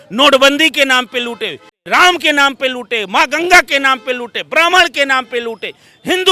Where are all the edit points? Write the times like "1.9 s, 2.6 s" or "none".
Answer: 1.8 s